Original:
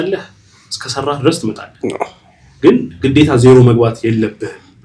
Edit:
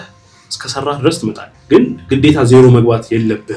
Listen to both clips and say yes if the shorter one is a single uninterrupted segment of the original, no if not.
no